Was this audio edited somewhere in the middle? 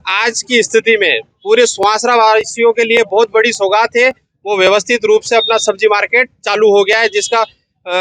no; 0 cuts

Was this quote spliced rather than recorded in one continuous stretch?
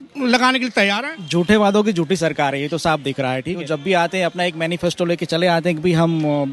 yes; 2 cuts; at 1.1 s, 3.5 s

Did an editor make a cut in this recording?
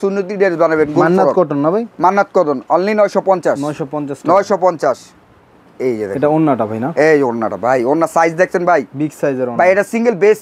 no; 0 cuts

